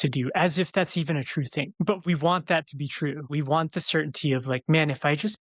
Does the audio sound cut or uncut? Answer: cut